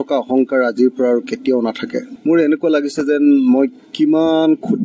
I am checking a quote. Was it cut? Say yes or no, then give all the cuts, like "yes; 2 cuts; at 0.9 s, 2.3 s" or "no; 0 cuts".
yes; 1 cut; at 2.1 s